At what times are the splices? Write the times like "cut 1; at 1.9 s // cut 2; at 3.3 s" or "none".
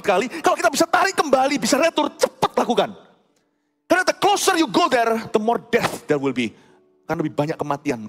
none

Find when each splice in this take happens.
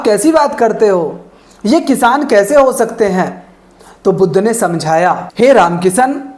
none

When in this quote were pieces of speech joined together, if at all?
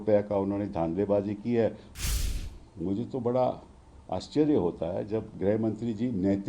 cut 1; at 2.1 s

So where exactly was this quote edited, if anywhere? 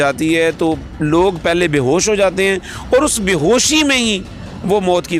none

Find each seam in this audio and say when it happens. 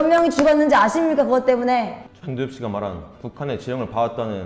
none

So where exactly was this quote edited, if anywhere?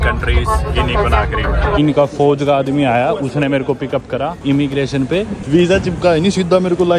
cut 1; at 1.8 s // cut 2; at 4.4 s // cut 3; at 5.4 s

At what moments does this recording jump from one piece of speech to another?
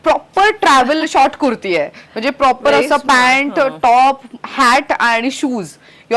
none

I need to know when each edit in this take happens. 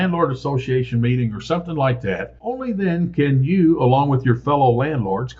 cut 1; at 2.6 s

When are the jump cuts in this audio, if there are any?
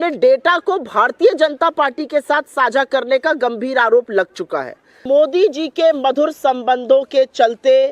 cut 1; at 5.0 s

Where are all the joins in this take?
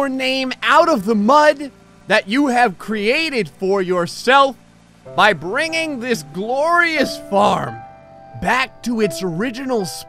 none

